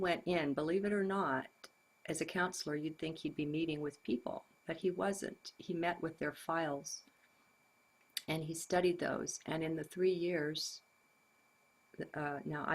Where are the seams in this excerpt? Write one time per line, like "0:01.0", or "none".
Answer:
0:02.6